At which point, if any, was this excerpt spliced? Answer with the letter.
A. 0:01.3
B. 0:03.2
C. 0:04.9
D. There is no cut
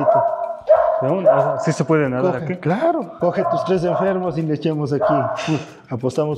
B